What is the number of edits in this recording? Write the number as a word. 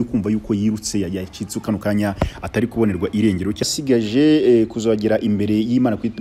one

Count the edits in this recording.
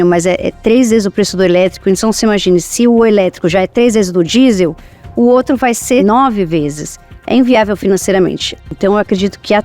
two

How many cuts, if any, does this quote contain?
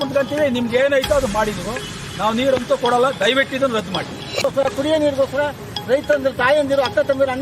one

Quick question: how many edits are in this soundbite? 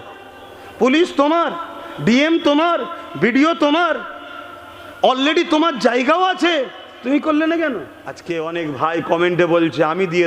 one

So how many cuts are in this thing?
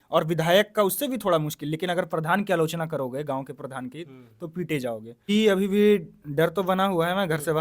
one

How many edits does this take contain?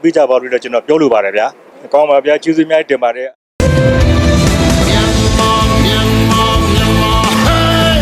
zero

